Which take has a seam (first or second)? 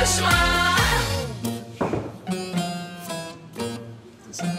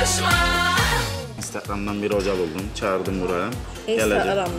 first